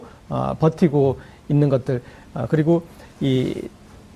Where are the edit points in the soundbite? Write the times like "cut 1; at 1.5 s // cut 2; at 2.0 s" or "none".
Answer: none